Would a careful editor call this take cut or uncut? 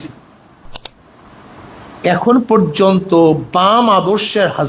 uncut